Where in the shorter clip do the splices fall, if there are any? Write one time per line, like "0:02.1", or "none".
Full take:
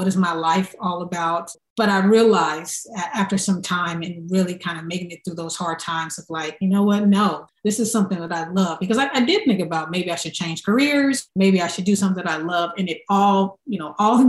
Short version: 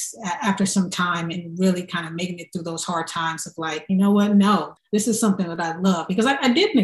none